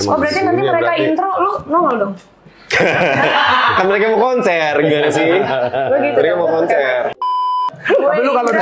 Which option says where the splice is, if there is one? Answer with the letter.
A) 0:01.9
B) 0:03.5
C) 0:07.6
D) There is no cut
C